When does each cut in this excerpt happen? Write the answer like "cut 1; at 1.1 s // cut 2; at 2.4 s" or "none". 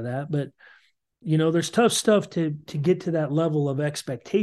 cut 1; at 1.2 s